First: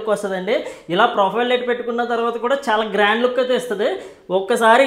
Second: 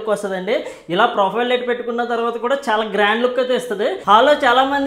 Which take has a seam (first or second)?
second